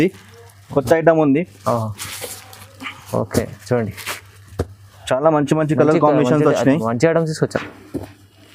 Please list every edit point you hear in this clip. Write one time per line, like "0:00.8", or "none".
none